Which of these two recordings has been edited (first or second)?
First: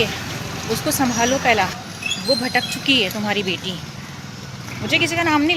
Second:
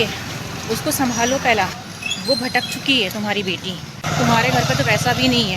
second